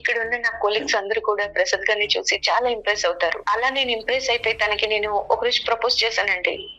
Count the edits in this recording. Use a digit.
1